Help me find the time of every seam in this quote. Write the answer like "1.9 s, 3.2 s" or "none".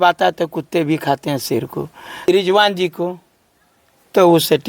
2.2 s